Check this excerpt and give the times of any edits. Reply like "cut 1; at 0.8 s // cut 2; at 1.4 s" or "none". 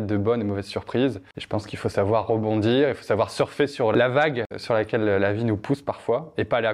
cut 1; at 1.3 s // cut 2; at 3.9 s